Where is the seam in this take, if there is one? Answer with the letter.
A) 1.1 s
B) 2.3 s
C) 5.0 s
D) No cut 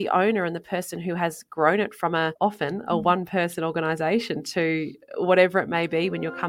B